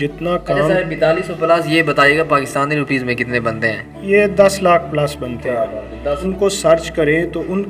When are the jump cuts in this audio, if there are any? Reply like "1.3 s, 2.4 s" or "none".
6.2 s